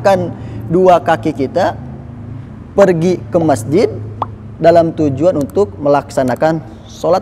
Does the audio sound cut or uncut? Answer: uncut